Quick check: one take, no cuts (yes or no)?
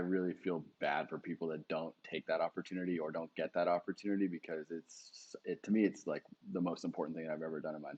yes